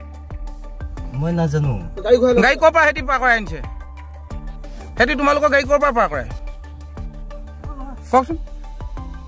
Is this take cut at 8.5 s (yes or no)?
yes